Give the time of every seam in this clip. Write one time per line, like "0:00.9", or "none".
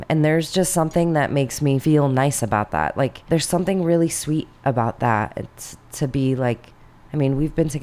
0:01.8
0:03.2